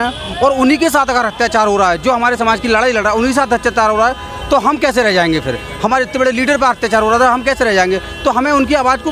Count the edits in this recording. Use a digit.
0